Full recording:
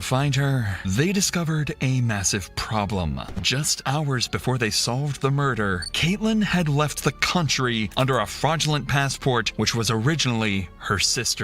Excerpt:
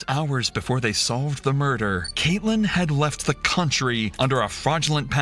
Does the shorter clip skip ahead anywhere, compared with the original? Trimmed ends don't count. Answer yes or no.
no